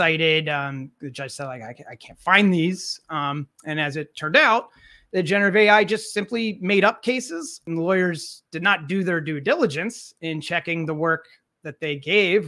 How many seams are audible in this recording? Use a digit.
1